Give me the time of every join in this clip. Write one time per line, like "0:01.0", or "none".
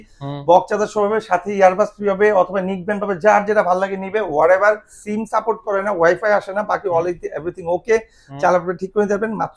0:05.0